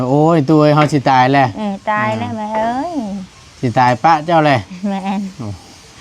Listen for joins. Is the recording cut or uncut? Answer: uncut